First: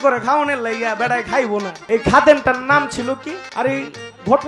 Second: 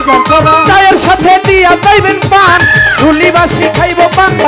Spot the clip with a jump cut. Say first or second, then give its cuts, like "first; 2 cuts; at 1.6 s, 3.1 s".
first; 2 cuts; at 1.8 s, 3.4 s